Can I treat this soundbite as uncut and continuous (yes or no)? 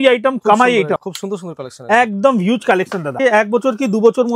no